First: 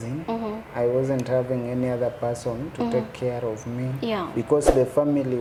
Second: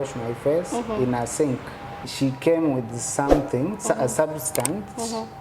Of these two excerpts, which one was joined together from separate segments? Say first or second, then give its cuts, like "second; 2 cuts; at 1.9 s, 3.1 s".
second; 1 cut; at 2.0 s